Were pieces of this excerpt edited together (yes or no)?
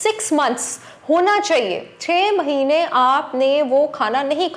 no